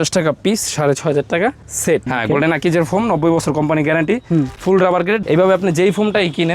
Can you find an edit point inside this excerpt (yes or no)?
yes